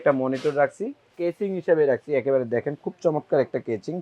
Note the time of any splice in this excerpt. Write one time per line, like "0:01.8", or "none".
0:01.1